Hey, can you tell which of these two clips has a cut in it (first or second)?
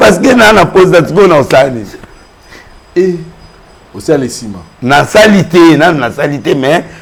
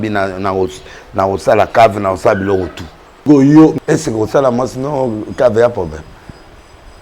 second